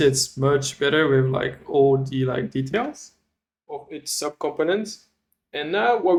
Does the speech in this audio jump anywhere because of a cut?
no; 0 cuts

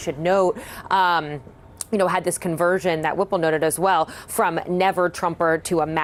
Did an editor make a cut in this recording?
no; 0 cuts

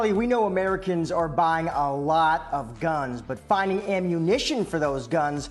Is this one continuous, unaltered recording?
yes; 0 cuts

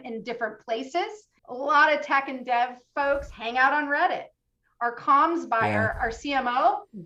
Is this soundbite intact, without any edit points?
no; 1 cut; at 1.3 s

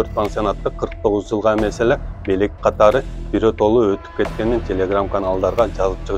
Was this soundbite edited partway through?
no; 0 cuts

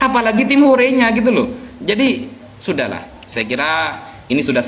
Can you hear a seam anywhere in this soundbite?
no; 0 cuts

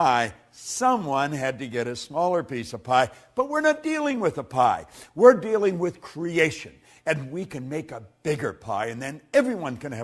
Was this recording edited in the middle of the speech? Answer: yes; 1 cut; at 2.8 s

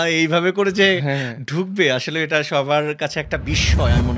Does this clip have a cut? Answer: no; 0 cuts

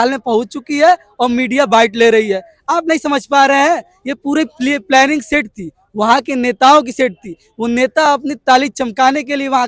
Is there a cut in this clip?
no; 0 cuts

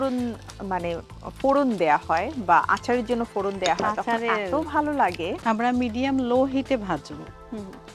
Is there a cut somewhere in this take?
yes; 1 cut; at 5.4 s

